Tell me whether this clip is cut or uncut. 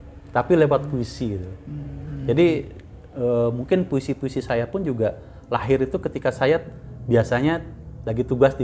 uncut